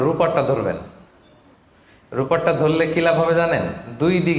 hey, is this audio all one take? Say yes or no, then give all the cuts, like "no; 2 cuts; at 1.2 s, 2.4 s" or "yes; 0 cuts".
yes; 0 cuts